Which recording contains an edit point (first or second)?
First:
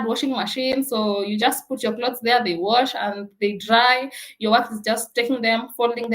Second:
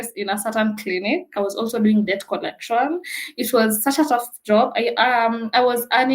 second